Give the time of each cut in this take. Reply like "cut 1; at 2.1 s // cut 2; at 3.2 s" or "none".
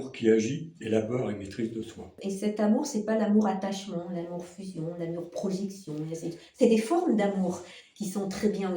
cut 1; at 2.2 s

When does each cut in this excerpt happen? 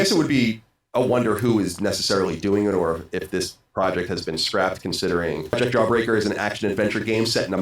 cut 1; at 5.5 s

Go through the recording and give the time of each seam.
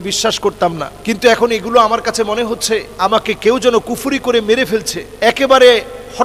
cut 1; at 0.9 s // cut 2; at 2.9 s // cut 3; at 5.0 s

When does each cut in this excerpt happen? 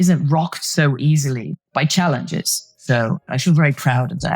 cut 1; at 1.5 s // cut 2; at 3.2 s

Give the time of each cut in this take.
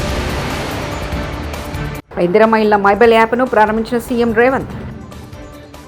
cut 1; at 2.0 s

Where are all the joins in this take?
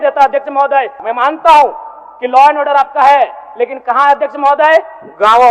cut 1; at 1.0 s

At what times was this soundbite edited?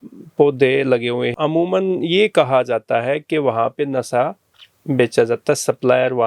cut 1; at 1.3 s

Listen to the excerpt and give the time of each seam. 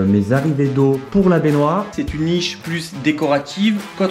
cut 1; at 1.9 s

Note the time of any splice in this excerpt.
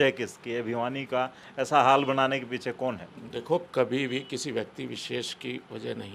none

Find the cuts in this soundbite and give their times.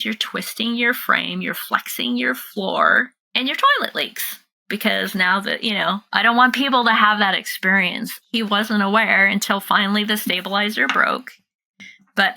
cut 1; at 3.2 s // cut 2; at 6.1 s

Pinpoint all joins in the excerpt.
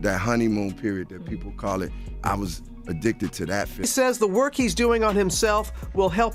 cut 1; at 3.7 s

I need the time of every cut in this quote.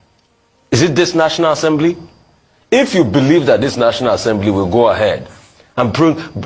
none

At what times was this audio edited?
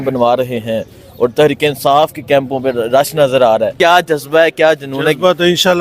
cut 1; at 3.7 s

